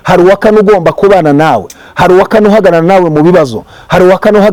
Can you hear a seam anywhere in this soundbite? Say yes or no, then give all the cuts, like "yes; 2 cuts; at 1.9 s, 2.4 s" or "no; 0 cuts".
no; 0 cuts